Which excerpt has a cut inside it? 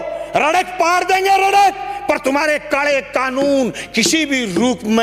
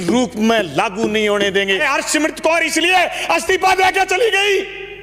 second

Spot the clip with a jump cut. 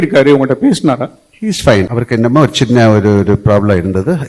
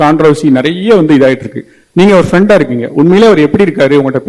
first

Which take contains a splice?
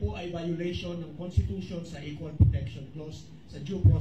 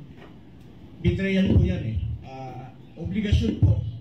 second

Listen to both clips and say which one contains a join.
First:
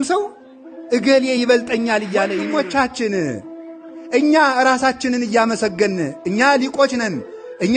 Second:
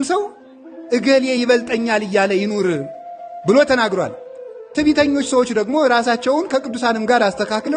first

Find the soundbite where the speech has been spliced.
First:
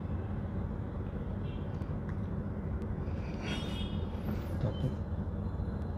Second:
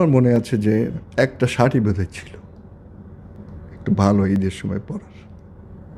second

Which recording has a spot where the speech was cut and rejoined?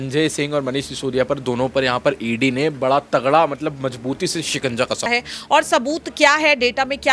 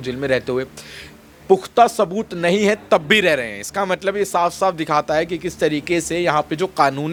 first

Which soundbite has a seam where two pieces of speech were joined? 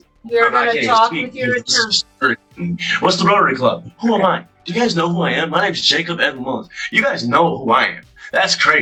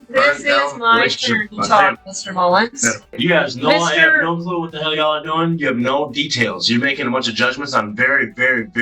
second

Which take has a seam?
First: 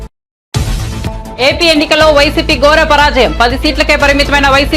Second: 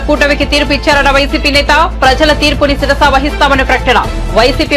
first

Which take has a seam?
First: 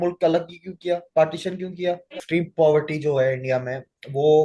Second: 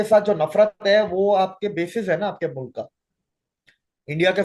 first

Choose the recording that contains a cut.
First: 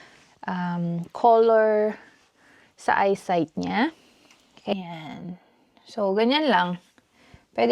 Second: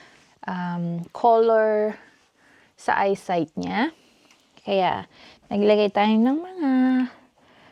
first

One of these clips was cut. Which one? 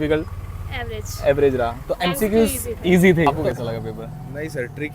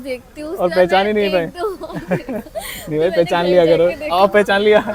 first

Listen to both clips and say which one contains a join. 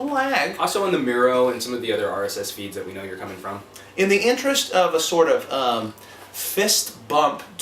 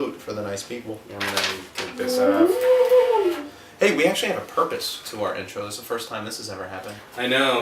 first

